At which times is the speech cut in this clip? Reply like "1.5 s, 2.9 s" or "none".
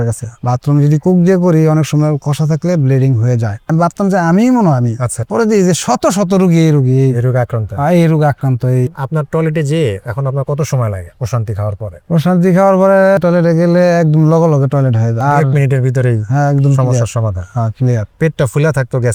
none